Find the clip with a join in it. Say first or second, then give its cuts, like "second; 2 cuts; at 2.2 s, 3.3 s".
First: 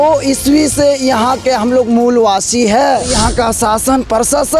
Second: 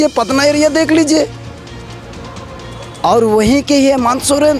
first; 1 cut; at 3.1 s